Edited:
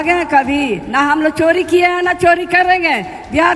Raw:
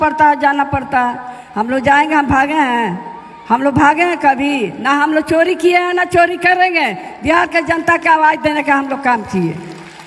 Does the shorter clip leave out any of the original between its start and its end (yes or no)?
no